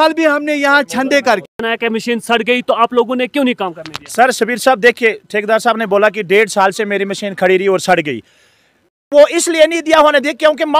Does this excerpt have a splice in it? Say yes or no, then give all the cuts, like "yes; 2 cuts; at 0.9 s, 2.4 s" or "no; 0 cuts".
yes; 2 cuts; at 1.5 s, 8.9 s